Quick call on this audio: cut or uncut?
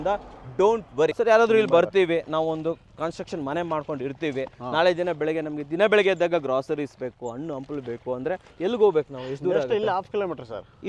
cut